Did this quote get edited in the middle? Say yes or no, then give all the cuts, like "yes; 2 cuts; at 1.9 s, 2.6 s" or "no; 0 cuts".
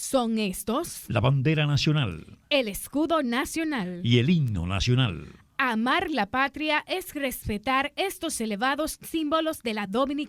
no; 0 cuts